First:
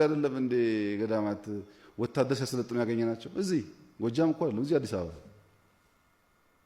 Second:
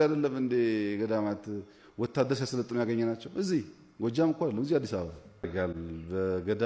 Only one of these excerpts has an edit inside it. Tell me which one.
second; 1 cut; at 5.5 s

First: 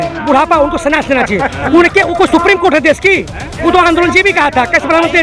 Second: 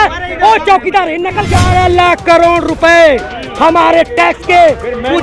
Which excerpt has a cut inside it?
second; 1 cut; at 1.5 s

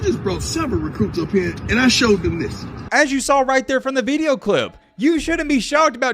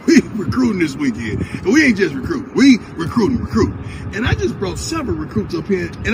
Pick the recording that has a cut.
first; 1 cut; at 2.7 s

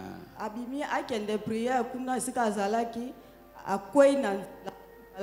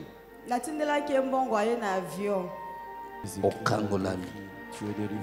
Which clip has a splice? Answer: second; 1 cut; at 3.2 s

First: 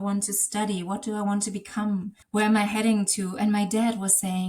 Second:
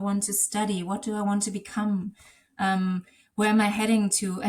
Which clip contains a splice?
first; 1 cut; at 2.2 s

